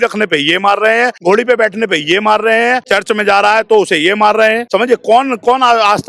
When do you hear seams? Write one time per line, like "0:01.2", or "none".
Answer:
0:01.2
0:02.8
0:04.6